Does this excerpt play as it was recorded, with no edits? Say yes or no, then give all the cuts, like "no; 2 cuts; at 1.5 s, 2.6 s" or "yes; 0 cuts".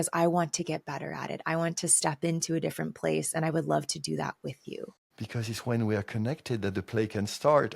no; 1 cut; at 5.0 s